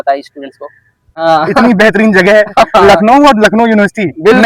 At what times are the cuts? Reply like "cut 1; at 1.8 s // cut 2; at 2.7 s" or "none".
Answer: cut 1; at 1.1 s

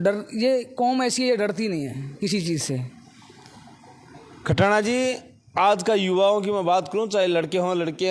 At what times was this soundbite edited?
none

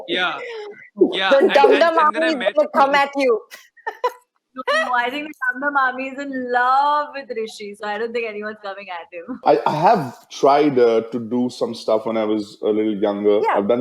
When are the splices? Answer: cut 1; at 9.4 s

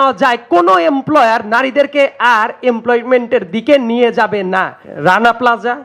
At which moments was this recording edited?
cut 1; at 4.8 s

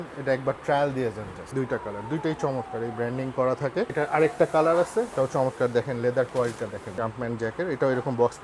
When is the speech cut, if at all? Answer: cut 1; at 1.4 s // cut 2; at 3.9 s // cut 3; at 5.1 s // cut 4; at 6.9 s

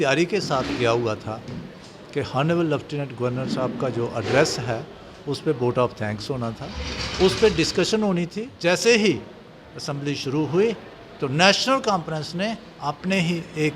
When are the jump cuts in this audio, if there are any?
cut 1; at 8.4 s

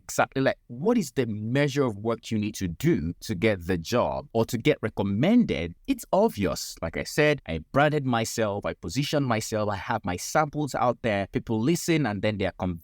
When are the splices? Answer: cut 1; at 3.2 s // cut 2; at 4.2 s // cut 3; at 5.7 s // cut 4; at 7.5 s // cut 5; at 11.3 s

